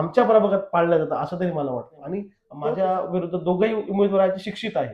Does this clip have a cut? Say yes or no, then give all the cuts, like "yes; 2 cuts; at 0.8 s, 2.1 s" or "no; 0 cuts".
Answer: yes; 1 cut; at 2.4 s